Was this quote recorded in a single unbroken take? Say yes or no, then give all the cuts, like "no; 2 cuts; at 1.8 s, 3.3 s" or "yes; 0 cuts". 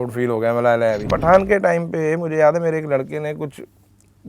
no; 1 cut; at 1.2 s